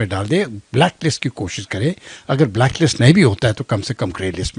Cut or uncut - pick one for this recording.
uncut